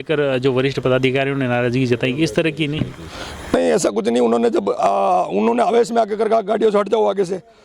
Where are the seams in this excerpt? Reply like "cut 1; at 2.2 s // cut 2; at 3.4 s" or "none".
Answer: none

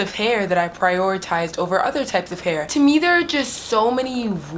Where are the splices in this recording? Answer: cut 1; at 2.6 s

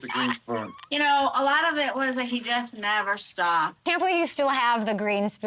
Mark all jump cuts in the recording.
cut 1; at 3.8 s

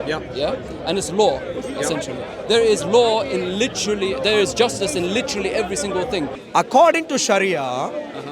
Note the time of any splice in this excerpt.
cut 1; at 6.4 s

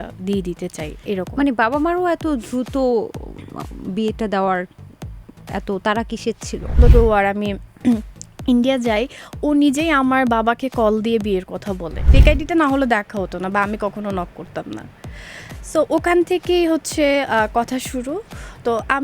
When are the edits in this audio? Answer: cut 1; at 6.8 s // cut 2; at 12.1 s

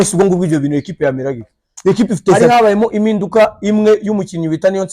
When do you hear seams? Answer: cut 1; at 2.4 s

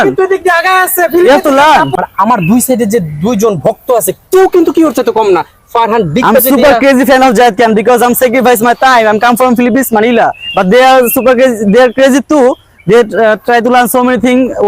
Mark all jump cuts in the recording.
cut 1; at 1.9 s

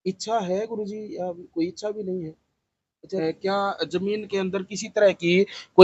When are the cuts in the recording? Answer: cut 1; at 3.2 s

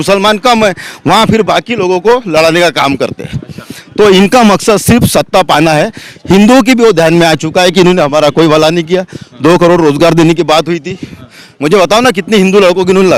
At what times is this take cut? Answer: none

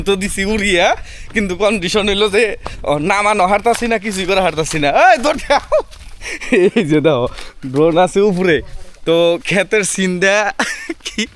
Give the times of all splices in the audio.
none

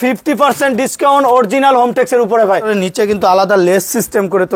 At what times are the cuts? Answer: cut 1; at 2.7 s

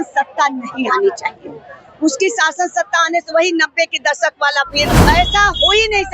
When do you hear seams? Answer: cut 1; at 5.0 s

